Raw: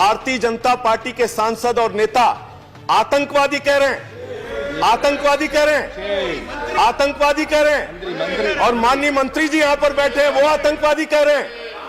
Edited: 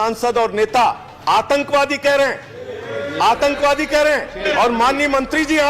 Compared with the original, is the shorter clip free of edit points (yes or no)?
no